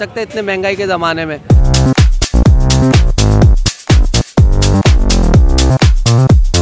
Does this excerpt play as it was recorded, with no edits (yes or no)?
yes